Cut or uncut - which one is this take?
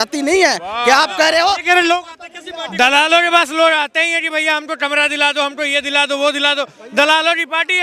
uncut